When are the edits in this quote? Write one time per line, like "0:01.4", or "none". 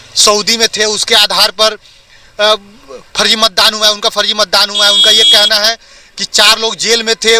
none